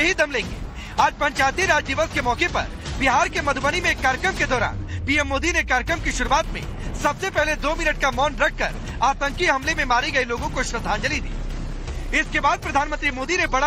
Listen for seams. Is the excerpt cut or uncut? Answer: uncut